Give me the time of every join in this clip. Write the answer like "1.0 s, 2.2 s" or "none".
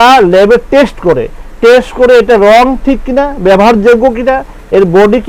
none